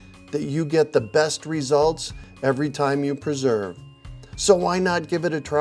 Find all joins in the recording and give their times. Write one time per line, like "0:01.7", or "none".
none